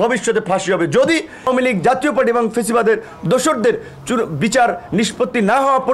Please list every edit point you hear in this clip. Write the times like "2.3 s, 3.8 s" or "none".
1.5 s